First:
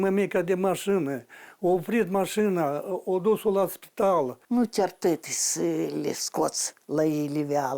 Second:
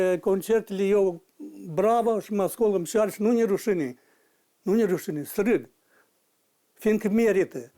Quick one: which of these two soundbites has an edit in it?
first; 1 cut; at 4.4 s

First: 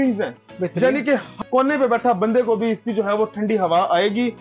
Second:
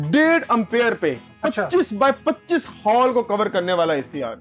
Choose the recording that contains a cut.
first; 1 cut; at 1.4 s

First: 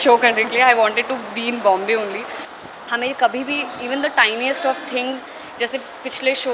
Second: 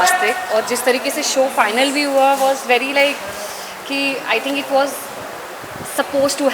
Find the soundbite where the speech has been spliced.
first; 1 cut; at 2.3 s

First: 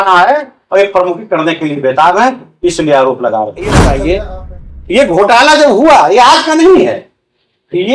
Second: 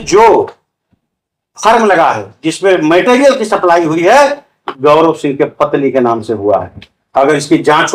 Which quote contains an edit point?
first; 1 cut; at 3.8 s

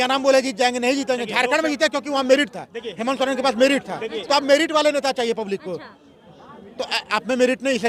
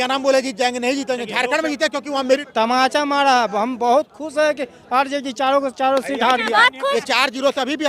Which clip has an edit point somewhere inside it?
second; 2 cuts; at 2.5 s, 6.9 s

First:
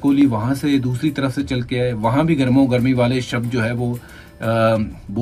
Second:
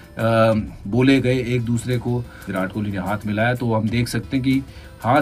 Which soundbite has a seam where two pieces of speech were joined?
second; 1 cut; at 2.5 s

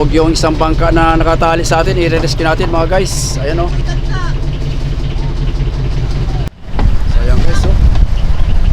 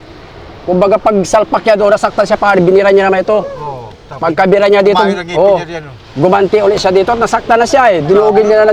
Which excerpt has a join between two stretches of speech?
first; 1 cut; at 6.5 s

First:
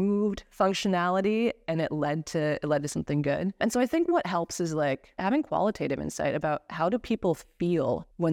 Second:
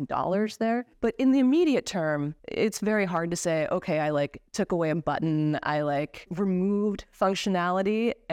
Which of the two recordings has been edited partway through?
first; 2 cuts; at 3.6 s, 5.2 s

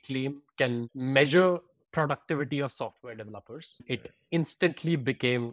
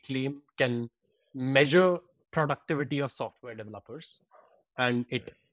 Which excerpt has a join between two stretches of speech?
first; 2 cuts; at 0.9 s, 3.9 s

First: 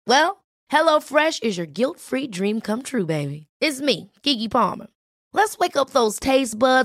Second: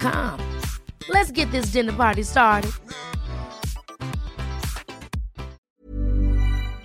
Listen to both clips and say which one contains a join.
second; 1 cut; at 5.7 s

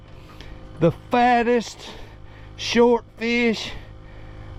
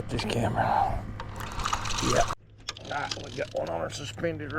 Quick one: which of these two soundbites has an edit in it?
second; 1 cut; at 2.3 s

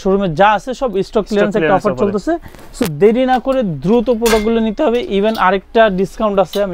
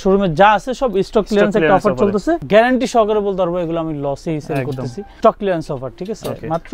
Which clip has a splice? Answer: second; 2 cuts; at 2.4 s, 5.1 s

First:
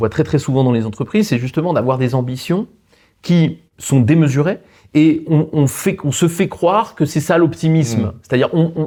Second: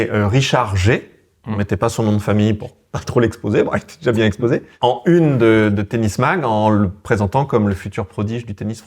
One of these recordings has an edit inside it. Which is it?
second; 1 cut; at 4.7 s

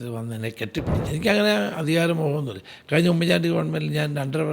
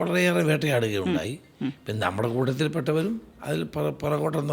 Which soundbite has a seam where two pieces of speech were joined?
first; 1 cut; at 1.0 s

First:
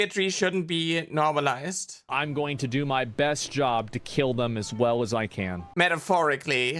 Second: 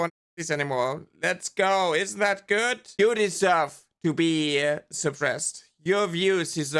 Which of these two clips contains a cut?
first; 1 cut; at 2.0 s

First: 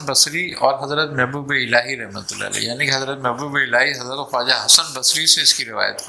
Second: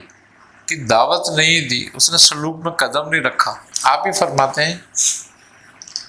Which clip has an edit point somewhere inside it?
second; 1 cut; at 3.6 s

